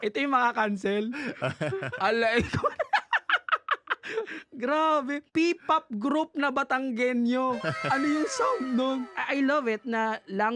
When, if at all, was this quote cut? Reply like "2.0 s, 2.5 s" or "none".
none